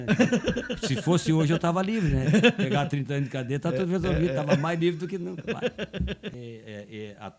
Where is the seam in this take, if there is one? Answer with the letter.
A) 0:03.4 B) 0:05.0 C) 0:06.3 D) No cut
C